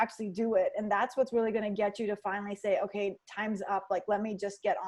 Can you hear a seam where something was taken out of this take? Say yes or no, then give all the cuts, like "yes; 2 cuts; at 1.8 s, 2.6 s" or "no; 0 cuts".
no; 0 cuts